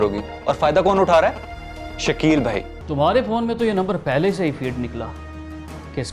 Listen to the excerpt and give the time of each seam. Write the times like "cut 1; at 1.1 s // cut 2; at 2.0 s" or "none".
cut 1; at 2.8 s

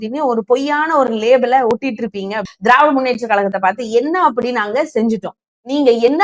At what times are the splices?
cut 1; at 2.4 s

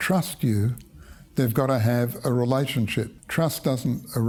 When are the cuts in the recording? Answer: none

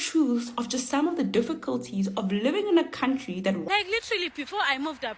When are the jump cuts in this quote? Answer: cut 1; at 3.6 s

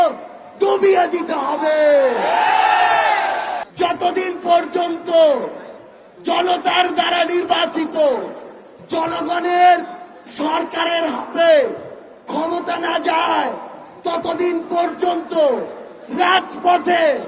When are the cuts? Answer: cut 1; at 3.6 s

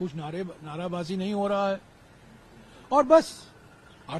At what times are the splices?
none

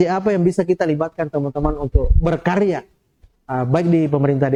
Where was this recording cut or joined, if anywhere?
none

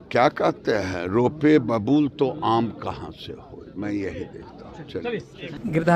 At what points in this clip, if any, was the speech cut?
none

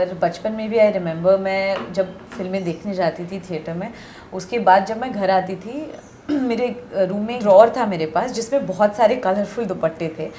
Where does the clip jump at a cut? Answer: cut 1; at 7.4 s

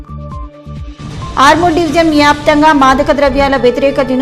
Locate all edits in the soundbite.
none

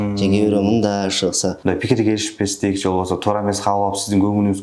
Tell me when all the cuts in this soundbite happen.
cut 1; at 1.6 s

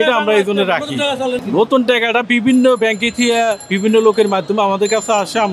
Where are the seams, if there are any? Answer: none

